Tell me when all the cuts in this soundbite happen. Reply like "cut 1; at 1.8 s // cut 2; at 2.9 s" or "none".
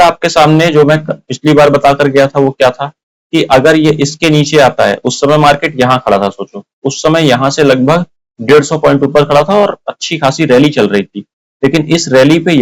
none